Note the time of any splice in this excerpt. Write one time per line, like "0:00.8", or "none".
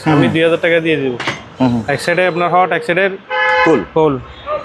0:01.4